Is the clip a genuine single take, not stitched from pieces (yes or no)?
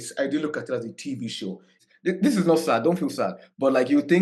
no